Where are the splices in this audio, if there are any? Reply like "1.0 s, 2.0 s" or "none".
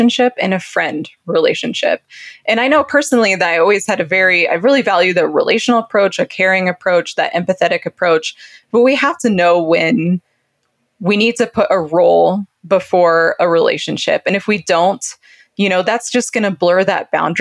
none